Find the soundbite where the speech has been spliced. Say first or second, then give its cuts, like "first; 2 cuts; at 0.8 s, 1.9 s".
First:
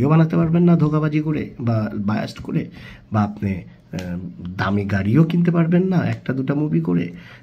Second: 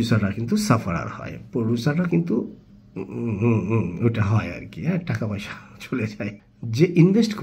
second; 1 cut; at 6.5 s